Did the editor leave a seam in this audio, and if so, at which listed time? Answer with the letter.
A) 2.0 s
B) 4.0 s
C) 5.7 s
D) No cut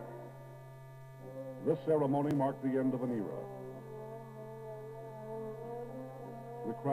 D